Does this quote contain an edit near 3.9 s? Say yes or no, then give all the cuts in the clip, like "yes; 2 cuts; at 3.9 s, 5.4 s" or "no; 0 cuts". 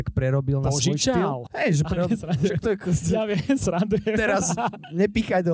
no; 1 cut; at 1.5 s